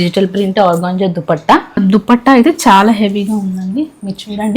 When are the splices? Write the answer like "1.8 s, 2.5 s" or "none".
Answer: 1.8 s